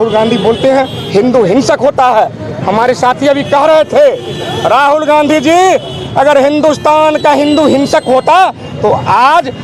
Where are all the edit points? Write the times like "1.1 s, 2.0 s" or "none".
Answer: none